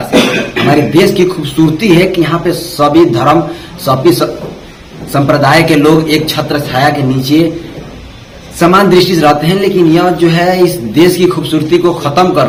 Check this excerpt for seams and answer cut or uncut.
uncut